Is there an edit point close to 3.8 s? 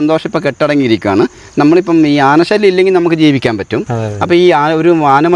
no; 0 cuts

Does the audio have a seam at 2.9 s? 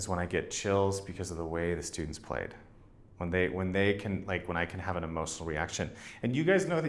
no; 0 cuts

